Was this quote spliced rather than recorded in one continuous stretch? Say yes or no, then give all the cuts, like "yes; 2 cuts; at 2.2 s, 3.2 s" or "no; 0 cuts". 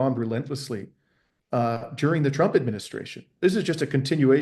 no; 0 cuts